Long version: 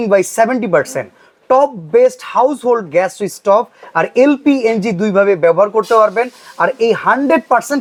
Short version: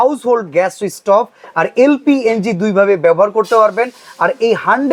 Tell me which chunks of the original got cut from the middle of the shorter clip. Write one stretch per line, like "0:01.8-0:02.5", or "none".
none